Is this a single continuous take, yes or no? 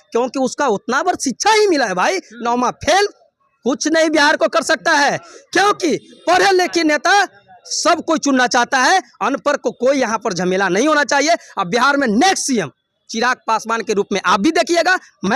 yes